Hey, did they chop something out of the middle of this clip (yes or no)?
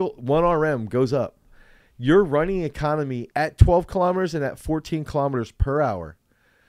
yes